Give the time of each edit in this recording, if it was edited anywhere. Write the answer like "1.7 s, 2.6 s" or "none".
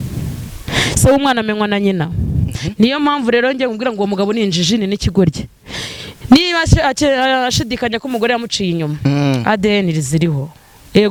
none